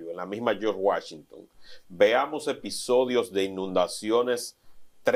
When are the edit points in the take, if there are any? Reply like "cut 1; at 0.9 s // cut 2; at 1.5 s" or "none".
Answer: none